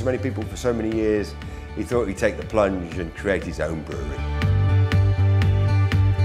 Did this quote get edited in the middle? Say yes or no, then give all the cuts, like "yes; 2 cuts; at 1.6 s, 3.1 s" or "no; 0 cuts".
yes; 1 cut; at 3.1 s